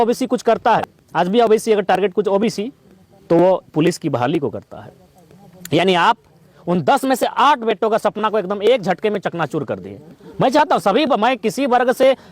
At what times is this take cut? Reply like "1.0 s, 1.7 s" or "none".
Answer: 1.0 s

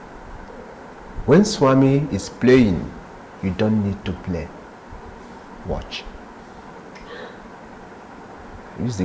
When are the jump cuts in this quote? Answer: none

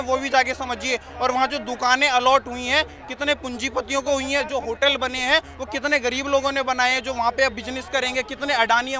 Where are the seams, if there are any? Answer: none

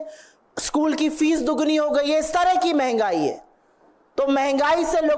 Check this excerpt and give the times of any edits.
none

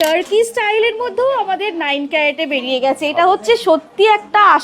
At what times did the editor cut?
none

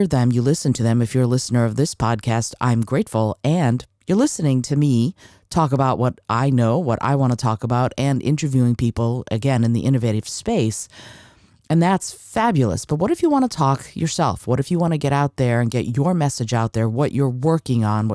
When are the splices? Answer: none

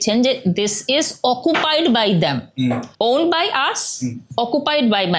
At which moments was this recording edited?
none

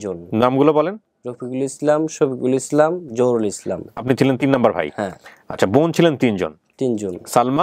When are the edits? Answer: none

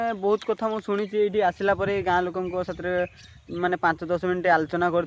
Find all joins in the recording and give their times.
none

